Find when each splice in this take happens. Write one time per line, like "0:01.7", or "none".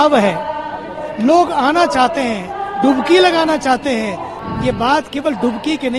0:04.3